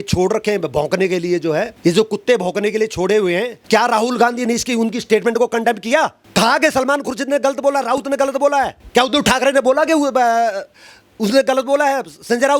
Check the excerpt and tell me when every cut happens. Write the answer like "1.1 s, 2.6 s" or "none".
1.7 s, 3.6 s, 6.2 s, 8.8 s